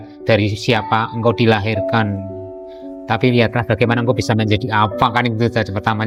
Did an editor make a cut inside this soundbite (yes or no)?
no